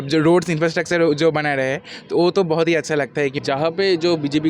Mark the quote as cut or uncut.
cut